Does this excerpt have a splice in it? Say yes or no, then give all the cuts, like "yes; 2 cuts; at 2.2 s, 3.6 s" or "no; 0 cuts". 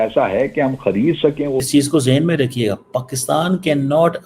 yes; 1 cut; at 1.6 s